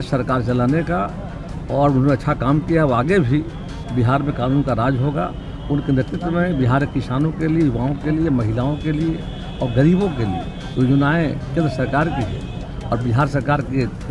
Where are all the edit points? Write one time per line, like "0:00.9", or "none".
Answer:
none